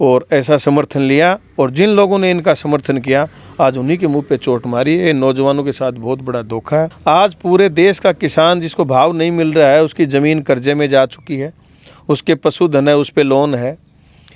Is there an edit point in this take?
yes; 1 cut; at 7.0 s

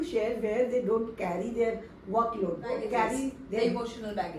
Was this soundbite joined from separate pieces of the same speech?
yes; 1 cut; at 2.8 s

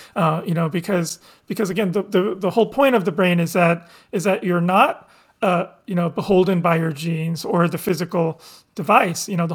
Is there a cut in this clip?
no; 0 cuts

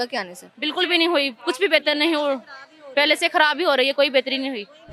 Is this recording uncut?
yes; 0 cuts

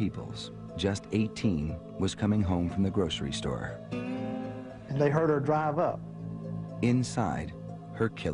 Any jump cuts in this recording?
no; 0 cuts

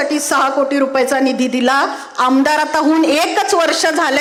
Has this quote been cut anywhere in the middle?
no; 0 cuts

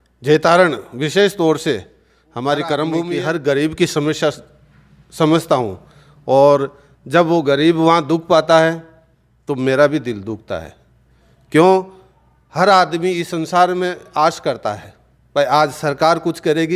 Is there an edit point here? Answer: yes; 1 cut; at 3.1 s

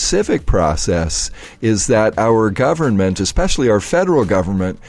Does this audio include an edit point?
yes; 1 cut; at 3.2 s

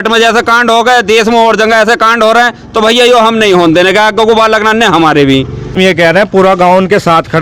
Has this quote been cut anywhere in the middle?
yes; 1 cut; at 5.8 s

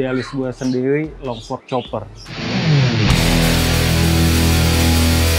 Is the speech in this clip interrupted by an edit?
no; 0 cuts

